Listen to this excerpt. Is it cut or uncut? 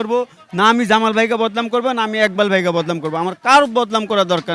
uncut